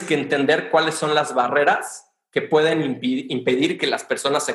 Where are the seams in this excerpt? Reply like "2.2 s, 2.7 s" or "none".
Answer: none